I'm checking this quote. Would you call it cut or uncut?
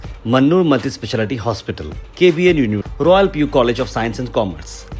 uncut